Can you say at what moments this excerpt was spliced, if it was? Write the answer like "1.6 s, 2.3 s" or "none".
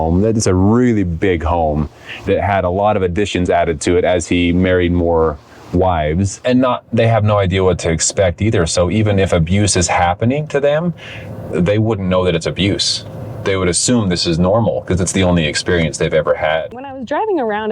6.3 s, 16.8 s